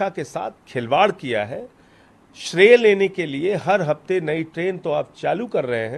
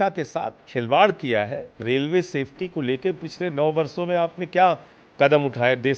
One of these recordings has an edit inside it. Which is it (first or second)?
second